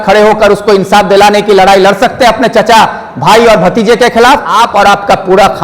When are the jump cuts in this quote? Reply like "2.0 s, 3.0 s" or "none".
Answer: 4.5 s